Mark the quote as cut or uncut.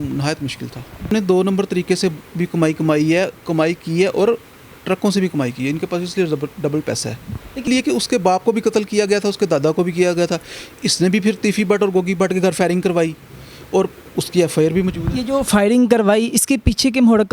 cut